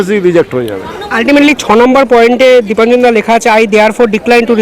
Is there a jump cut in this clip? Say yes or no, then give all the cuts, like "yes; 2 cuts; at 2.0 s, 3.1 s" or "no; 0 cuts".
no; 0 cuts